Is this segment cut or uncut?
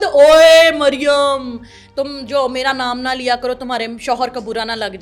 uncut